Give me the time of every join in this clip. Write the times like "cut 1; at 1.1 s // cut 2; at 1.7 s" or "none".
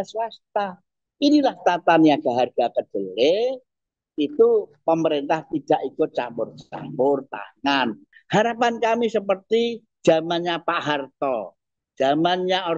cut 1; at 8.0 s